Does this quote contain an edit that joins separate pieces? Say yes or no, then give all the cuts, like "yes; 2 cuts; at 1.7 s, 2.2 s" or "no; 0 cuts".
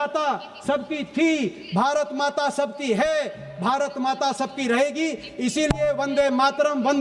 no; 0 cuts